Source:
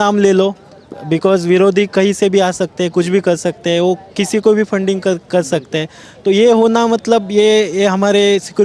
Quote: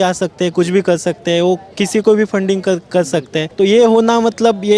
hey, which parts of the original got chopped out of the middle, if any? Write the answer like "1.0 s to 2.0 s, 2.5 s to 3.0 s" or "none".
5.8 s to 6.1 s